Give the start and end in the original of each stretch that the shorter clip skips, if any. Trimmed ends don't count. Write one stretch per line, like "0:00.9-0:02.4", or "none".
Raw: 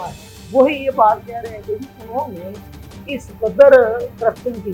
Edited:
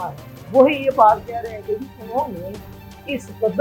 none